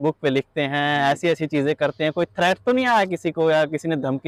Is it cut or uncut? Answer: uncut